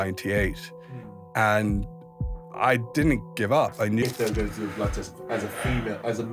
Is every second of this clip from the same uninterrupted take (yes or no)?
no